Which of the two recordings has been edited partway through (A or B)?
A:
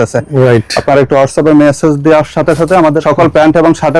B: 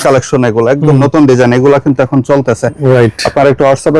A